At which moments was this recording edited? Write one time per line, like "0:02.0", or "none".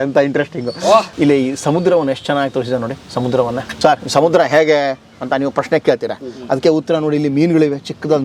0:01.1
0:03.7